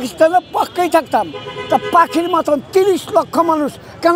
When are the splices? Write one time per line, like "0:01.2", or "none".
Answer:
none

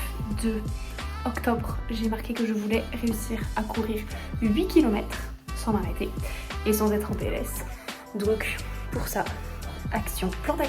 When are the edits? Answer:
none

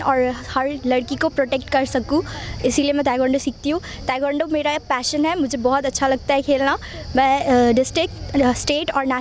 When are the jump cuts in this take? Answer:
none

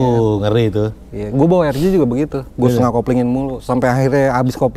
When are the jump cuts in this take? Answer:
none

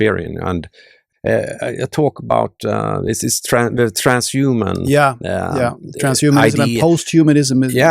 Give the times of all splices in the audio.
0:01.0

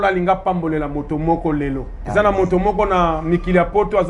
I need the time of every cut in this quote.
0:01.9

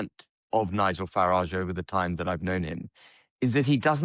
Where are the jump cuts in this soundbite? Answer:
none

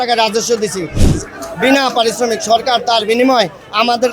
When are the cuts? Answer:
none

